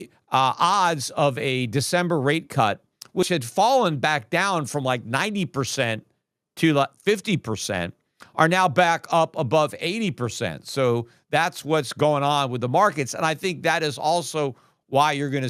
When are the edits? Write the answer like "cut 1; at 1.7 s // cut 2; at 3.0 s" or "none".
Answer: none

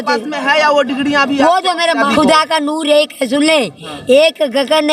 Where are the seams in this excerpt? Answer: cut 1; at 2.1 s

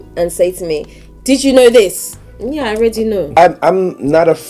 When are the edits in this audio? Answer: cut 1; at 3.4 s

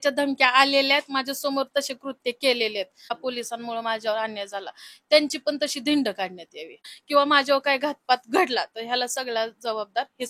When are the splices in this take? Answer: cut 1; at 3.2 s // cut 2; at 6.9 s

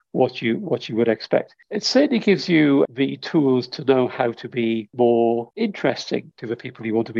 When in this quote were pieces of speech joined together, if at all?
cut 1; at 1.6 s // cut 2; at 2.9 s // cut 3; at 4.9 s // cut 4; at 5.5 s // cut 5; at 6.3 s

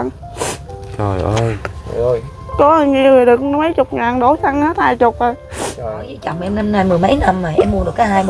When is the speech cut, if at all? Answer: cut 1; at 2.4 s // cut 2; at 6.3 s

